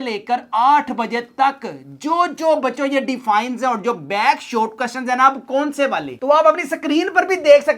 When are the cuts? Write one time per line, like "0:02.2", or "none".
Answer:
0:06.2